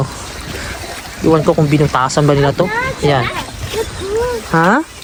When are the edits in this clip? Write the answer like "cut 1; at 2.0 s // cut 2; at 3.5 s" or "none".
none